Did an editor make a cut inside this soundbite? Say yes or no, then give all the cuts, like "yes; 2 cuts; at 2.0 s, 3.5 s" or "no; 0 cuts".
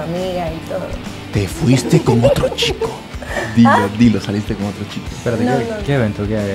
no; 0 cuts